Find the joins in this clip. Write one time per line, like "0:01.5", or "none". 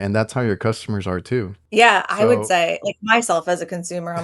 0:01.6